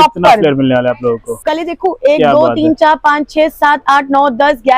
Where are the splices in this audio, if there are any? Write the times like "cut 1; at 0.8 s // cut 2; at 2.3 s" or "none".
cut 1; at 1.3 s